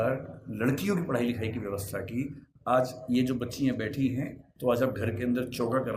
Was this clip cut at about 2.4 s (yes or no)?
no